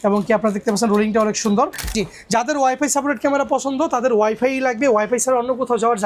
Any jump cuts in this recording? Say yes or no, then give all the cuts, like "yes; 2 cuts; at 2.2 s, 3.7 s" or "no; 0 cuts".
yes; 1 cut; at 1.8 s